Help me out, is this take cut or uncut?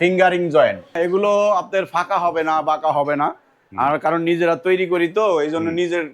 cut